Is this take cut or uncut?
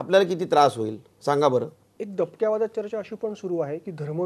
cut